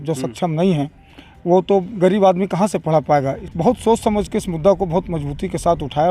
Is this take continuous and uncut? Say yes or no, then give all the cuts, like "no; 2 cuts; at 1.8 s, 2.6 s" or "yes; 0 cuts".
no; 1 cut; at 3.4 s